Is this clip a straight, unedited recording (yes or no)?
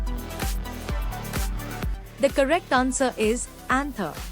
no